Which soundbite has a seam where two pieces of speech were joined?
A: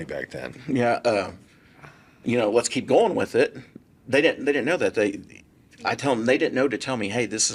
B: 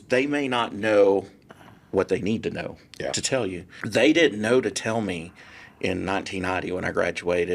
B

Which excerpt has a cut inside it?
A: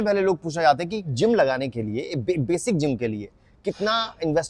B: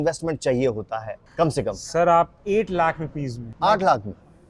B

